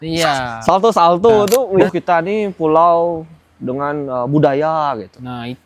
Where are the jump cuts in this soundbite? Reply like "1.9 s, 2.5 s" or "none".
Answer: 1.9 s